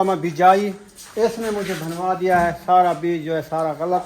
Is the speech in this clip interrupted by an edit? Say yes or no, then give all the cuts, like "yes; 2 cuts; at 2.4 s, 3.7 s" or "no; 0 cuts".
no; 0 cuts